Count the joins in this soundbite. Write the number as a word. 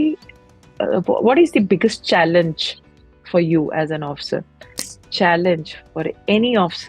one